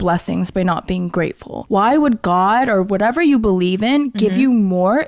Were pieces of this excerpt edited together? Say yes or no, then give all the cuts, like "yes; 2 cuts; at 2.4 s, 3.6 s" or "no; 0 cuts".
yes; 1 cut; at 1.5 s